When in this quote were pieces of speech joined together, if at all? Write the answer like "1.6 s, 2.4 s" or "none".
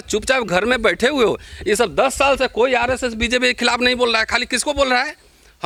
none